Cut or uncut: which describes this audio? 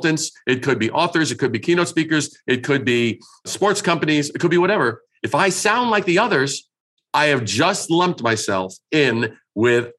uncut